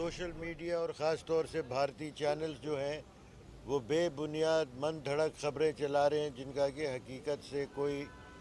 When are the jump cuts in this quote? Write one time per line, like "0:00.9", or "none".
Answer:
none

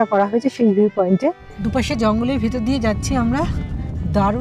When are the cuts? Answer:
0:01.5

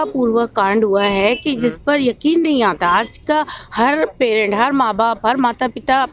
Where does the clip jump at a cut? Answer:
none

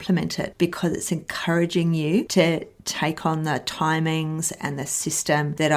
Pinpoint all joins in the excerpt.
none

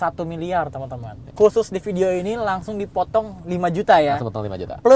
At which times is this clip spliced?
0:01.3

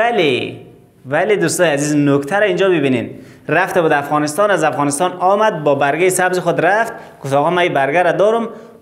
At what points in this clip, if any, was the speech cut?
none

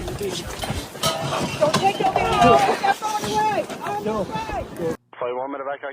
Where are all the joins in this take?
0:04.9

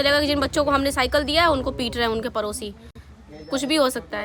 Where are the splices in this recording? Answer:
none

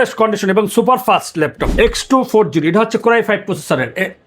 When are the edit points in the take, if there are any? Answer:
0:01.6

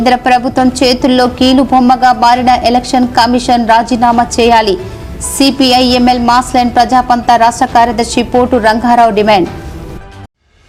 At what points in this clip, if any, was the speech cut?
none

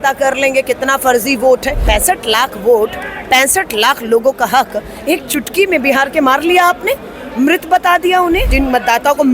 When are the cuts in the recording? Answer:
0:01.8
0:08.5

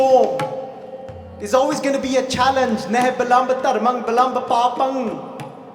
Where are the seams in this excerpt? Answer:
none

